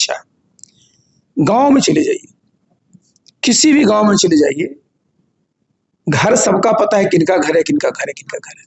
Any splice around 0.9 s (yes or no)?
no